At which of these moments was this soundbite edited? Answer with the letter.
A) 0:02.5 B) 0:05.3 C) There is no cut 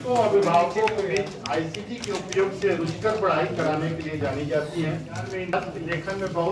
B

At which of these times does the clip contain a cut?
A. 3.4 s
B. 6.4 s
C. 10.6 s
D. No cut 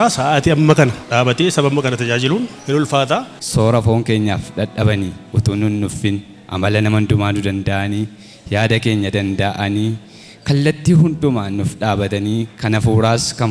A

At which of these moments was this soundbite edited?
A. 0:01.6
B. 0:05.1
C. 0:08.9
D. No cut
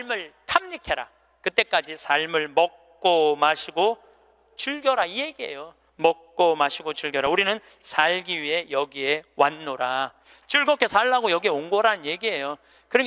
D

